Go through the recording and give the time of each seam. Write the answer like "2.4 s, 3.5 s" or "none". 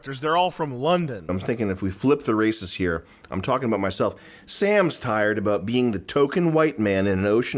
1.3 s

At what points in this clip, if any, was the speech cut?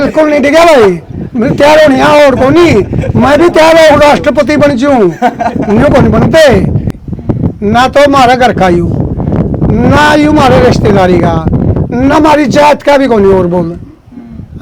6.7 s

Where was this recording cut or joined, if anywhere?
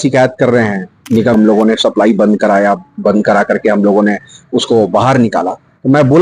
1.3 s

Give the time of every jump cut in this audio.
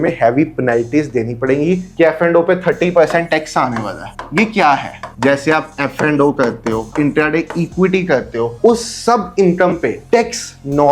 1.9 s, 5.0 s, 6.9 s, 8.5 s

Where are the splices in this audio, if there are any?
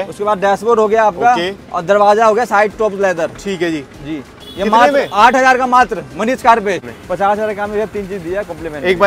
6.9 s

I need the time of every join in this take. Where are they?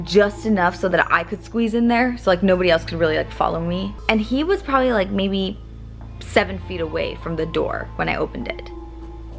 3.9 s

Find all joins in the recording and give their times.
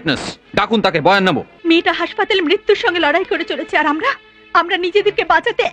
1.5 s

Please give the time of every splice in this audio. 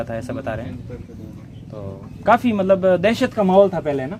none

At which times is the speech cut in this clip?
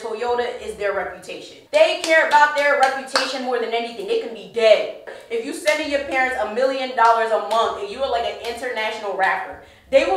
5.2 s

